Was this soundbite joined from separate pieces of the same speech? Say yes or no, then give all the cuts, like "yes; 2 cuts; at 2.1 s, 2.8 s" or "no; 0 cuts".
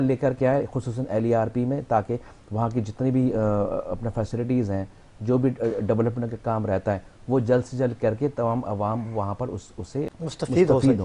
no; 0 cuts